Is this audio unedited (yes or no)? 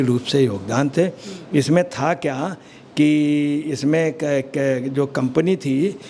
yes